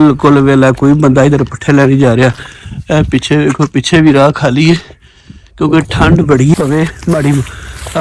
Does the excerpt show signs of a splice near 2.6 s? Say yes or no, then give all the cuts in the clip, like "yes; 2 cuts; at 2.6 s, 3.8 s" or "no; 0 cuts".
no; 1 cut; at 6.6 s